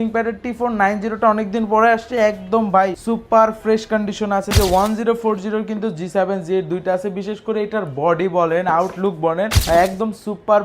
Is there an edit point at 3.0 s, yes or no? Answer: yes